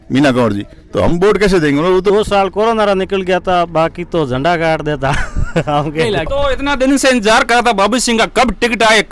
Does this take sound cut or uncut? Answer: cut